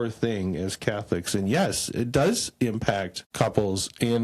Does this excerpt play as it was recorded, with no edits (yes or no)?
no